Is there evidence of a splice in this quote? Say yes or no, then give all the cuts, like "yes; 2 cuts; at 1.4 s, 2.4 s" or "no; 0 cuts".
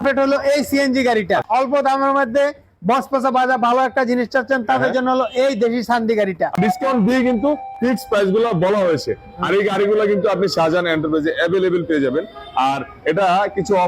yes; 2 cuts; at 1.4 s, 6.6 s